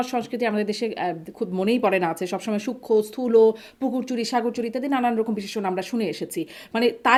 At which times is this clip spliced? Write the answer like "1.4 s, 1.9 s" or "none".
none